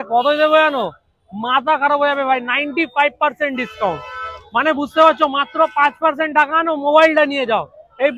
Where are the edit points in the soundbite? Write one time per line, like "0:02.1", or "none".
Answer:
none